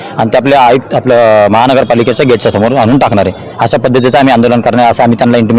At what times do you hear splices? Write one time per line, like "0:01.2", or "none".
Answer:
none